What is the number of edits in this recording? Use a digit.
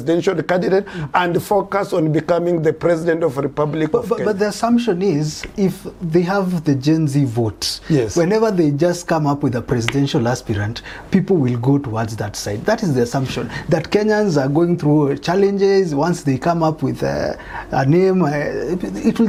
0